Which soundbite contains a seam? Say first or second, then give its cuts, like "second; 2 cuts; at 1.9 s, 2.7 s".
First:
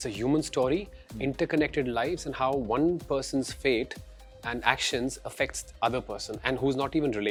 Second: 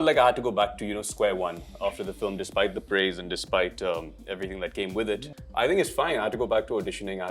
second; 1 cut; at 5.4 s